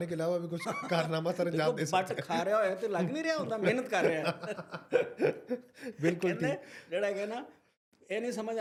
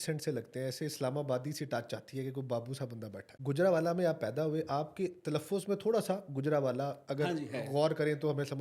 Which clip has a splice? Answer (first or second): second